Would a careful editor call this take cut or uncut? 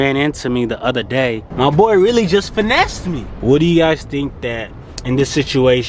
cut